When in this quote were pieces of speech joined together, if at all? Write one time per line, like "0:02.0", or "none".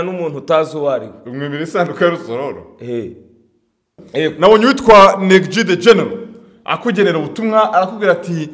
0:04.0